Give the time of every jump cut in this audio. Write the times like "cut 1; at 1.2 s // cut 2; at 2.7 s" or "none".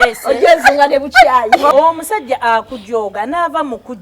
cut 1; at 1.7 s

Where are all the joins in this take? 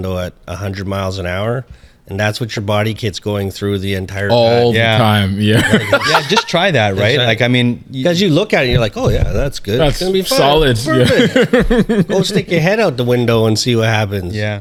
none

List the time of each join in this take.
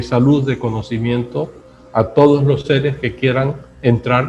none

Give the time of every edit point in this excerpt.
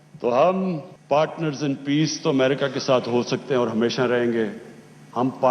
cut 1; at 0.9 s

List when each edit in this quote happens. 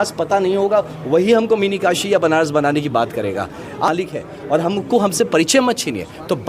cut 1; at 3.9 s

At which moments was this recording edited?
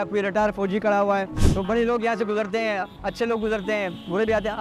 cut 1; at 1.3 s

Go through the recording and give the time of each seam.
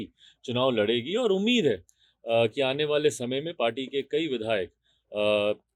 none

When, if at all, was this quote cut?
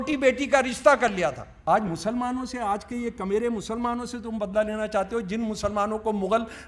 cut 1; at 1.5 s

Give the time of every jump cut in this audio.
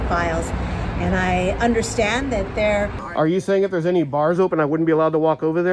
cut 1; at 2.9 s

